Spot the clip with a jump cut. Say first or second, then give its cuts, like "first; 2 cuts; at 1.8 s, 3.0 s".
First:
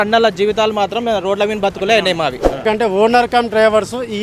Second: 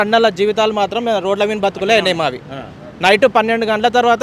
first; 1 cut; at 2.6 s